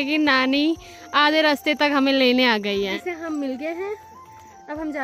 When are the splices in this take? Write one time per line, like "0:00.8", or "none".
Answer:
none